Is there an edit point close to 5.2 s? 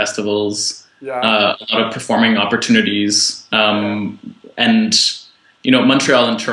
no; 1 cut; at 2.5 s

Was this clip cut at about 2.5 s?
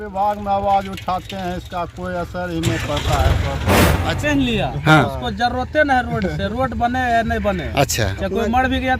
no; 1 cut; at 4.1 s

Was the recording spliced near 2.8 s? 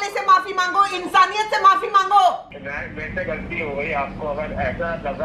no; 0 cuts

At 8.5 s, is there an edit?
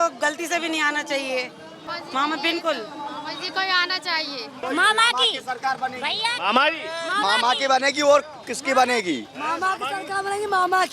no; 2 cuts; at 1.8 s, 4.6 s

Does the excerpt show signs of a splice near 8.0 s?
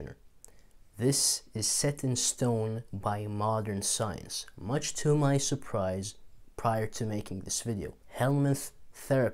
yes; 1 cut; at 8.0 s

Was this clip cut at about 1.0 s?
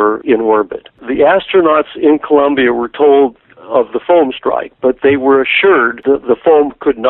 yes; 1 cut; at 1.0 s

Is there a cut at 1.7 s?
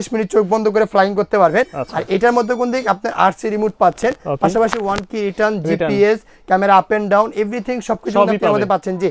no; 0 cuts

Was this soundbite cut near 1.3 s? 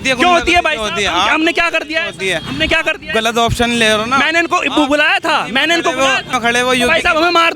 no; 1 cut; at 6.3 s

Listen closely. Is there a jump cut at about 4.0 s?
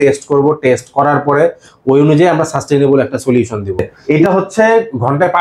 yes; 1 cut; at 4.0 s

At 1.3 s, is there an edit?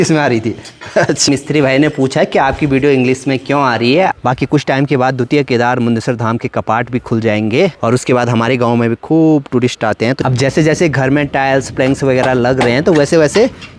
yes; 3 cuts; at 1.3 s, 4.1 s, 10.2 s

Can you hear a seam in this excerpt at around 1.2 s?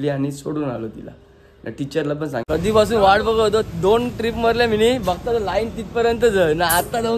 no; 1 cut; at 2.4 s

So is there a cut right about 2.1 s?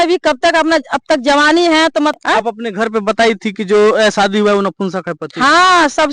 yes; 1 cut; at 2.1 s

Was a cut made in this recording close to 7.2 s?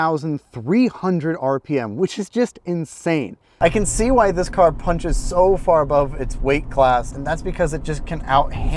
yes; 2 cuts; at 3.4 s, 7.2 s

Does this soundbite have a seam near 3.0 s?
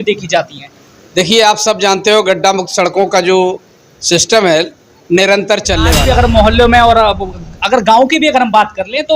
no; 1 cut; at 6.0 s

